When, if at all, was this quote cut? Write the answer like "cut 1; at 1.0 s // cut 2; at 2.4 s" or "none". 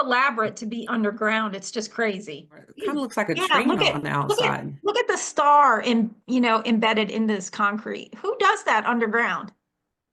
cut 1; at 2.7 s